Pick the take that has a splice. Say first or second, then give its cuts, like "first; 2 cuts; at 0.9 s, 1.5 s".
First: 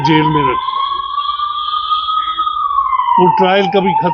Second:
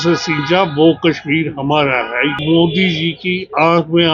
second; 1 cut; at 2.4 s